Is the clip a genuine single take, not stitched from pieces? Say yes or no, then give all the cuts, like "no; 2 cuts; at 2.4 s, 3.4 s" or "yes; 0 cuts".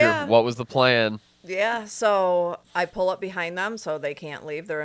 no; 1 cut; at 2.6 s